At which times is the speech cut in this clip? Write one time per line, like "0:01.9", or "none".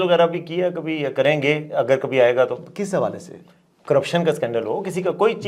none